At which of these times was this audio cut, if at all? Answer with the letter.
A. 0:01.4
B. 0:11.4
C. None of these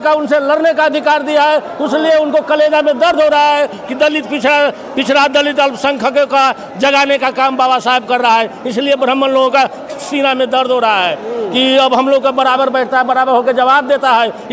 C